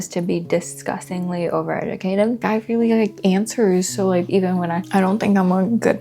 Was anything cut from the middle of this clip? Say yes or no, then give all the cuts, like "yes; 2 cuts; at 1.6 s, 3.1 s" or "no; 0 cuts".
yes; 2 cuts; at 2.4 s, 4.8 s